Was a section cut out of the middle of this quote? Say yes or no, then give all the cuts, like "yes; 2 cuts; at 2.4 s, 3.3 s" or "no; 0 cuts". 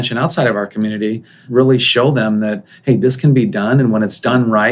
yes; 1 cut; at 1.3 s